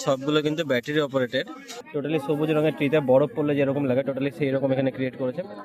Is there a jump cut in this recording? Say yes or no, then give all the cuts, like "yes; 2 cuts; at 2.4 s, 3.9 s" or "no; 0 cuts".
yes; 1 cut; at 1.8 s